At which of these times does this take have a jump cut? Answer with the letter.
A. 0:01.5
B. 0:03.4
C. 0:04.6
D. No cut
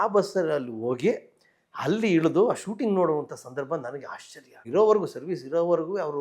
C